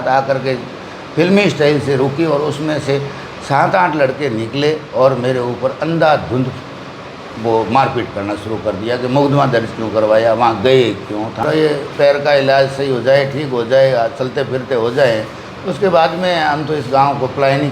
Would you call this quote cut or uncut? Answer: cut